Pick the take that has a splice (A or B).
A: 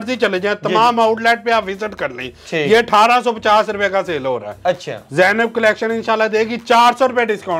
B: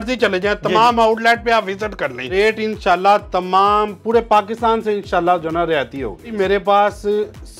B